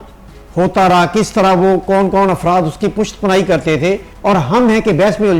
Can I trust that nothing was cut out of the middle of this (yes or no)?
no